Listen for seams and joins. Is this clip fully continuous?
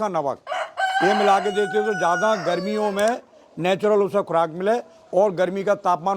yes; 0 cuts

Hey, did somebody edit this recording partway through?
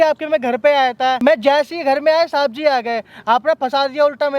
yes; 1 cut; at 1.2 s

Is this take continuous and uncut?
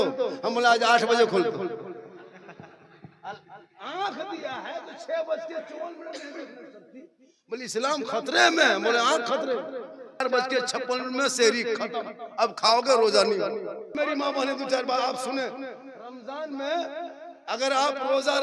no; 2 cuts; at 10.2 s, 13.9 s

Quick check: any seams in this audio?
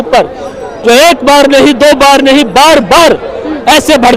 no; 0 cuts

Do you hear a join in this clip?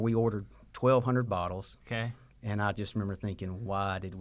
no; 0 cuts

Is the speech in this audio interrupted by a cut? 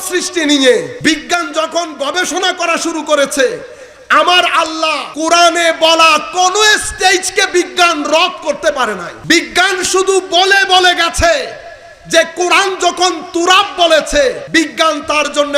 yes; 4 cuts; at 0.9 s, 5.0 s, 9.1 s, 14.4 s

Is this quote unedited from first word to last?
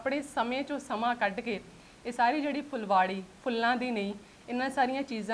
yes; 0 cuts

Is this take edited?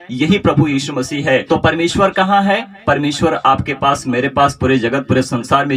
yes; 1 cut; at 1.4 s

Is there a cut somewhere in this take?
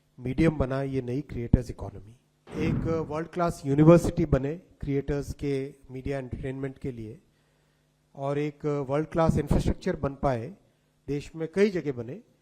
yes; 1 cut; at 2.4 s

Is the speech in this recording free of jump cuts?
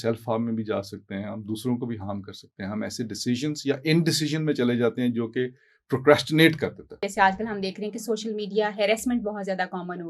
no; 1 cut; at 7.0 s

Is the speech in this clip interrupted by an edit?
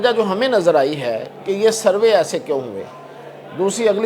no; 0 cuts

